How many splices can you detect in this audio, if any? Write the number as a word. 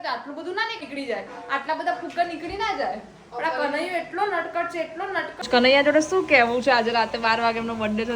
two